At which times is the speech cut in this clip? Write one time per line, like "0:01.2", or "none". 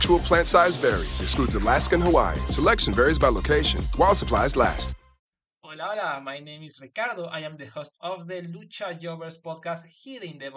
0:05.1